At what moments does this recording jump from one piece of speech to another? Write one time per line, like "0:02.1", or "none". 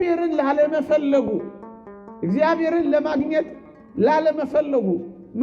none